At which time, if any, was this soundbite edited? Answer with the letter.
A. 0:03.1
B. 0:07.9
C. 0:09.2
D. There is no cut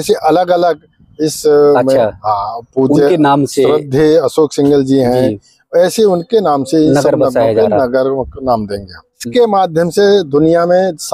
C